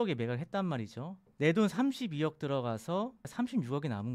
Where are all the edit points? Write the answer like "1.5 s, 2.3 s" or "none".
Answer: 1.2 s, 3.2 s